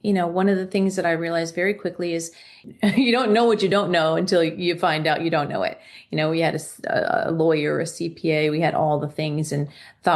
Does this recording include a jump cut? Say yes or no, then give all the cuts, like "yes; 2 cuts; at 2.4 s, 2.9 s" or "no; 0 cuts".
yes; 1 cut; at 2.6 s